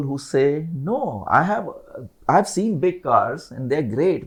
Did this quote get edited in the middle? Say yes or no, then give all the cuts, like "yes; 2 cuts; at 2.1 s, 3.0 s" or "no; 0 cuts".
no; 0 cuts